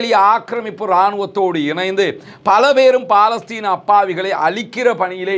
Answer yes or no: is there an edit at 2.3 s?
no